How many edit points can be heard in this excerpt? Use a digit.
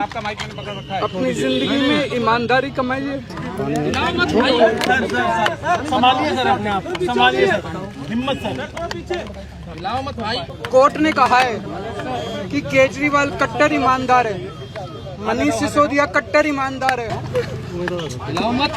3